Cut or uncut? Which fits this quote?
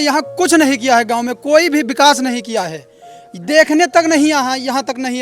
uncut